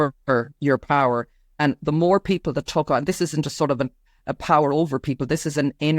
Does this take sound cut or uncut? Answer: uncut